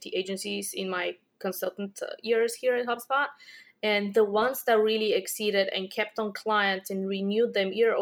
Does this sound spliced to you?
no; 0 cuts

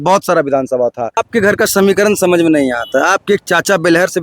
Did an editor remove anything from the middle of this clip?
yes; 1 cut; at 1.2 s

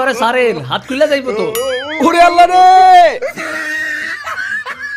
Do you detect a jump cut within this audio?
yes; 1 cut; at 3.2 s

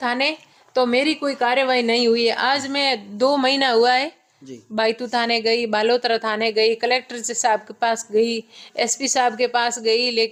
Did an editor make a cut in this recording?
no; 0 cuts

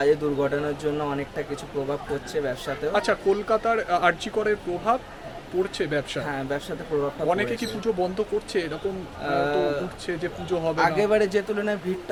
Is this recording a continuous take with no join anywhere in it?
yes; 0 cuts

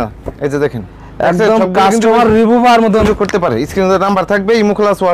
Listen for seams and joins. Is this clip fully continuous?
no; 1 cut; at 3.0 s

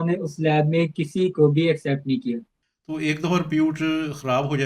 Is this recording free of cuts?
no; 1 cut; at 2.5 s

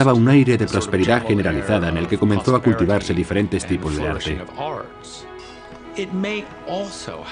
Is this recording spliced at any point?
no; 0 cuts

